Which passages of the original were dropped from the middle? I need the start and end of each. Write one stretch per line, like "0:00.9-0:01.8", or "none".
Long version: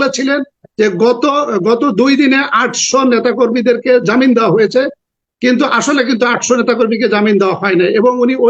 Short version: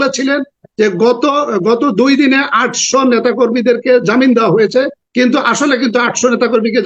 0:05.0-0:05.3